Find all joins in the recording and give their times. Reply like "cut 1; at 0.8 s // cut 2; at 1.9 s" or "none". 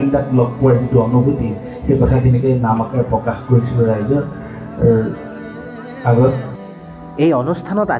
none

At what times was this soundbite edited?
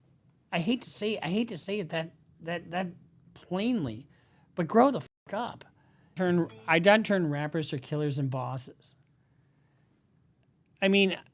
cut 1; at 6.2 s

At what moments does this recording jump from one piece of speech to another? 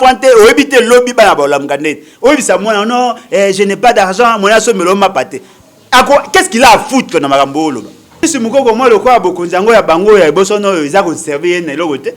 cut 1; at 8.2 s

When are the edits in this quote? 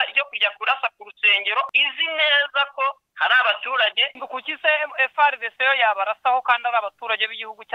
cut 1; at 1.7 s // cut 2; at 3.1 s // cut 3; at 4.1 s

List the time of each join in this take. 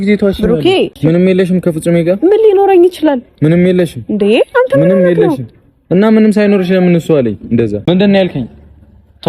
cut 1; at 1.0 s // cut 2; at 7.8 s

